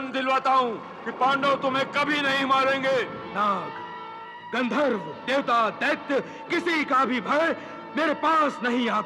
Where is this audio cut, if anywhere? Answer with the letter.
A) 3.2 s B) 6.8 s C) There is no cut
A